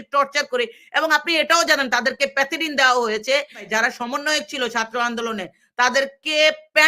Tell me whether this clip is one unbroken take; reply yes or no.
no